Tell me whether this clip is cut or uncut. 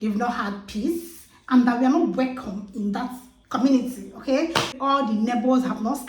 cut